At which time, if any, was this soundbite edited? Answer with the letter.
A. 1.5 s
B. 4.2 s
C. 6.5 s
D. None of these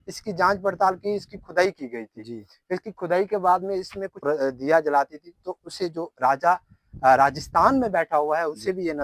B